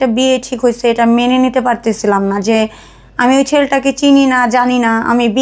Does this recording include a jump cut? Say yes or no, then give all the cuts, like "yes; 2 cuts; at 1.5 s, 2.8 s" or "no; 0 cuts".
no; 0 cuts